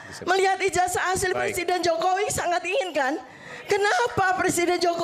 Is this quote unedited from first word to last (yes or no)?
yes